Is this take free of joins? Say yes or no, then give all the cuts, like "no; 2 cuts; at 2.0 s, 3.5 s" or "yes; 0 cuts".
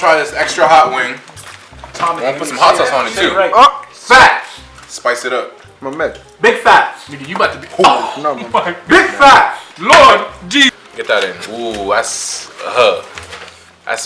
no; 1 cut; at 10.7 s